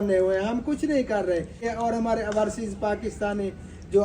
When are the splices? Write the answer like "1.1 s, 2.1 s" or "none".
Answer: 1.7 s

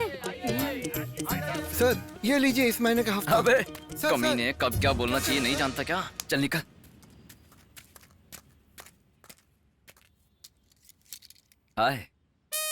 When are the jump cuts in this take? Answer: 1.6 s

